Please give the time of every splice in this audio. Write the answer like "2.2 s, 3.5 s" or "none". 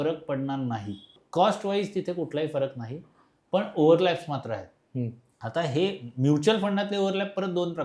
1.2 s